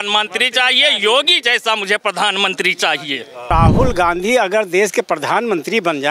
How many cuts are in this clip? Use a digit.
1